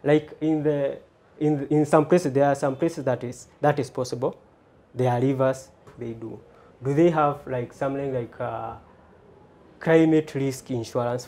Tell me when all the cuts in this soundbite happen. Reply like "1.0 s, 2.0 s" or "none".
6.0 s